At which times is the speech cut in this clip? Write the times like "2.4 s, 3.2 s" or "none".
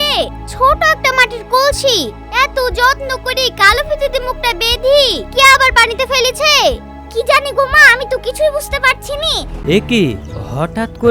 9.5 s